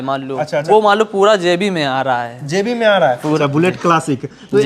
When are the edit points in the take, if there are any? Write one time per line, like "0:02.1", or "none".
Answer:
0:03.4

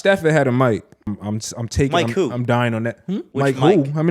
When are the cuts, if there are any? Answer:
0:01.1
0:03.3

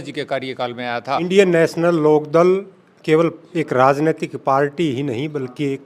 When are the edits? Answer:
0:01.3

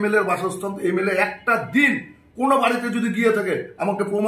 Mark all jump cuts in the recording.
none

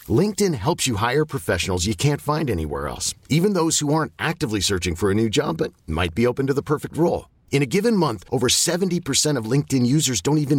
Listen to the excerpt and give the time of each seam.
none

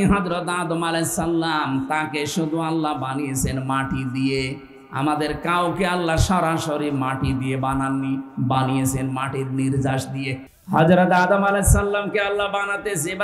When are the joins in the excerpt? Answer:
0:10.5

